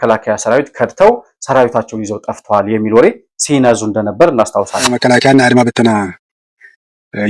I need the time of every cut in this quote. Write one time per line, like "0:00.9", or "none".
0:04.9